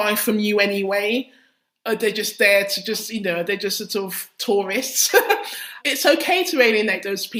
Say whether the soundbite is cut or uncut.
uncut